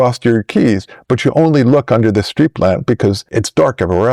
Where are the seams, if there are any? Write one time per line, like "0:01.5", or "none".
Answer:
none